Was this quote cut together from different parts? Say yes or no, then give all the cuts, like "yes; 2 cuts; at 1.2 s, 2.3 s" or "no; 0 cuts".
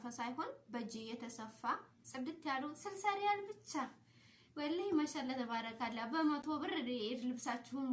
no; 0 cuts